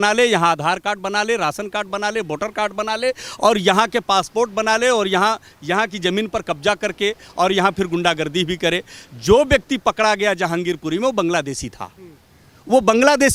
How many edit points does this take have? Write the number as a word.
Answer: zero